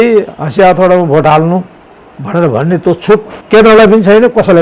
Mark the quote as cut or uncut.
cut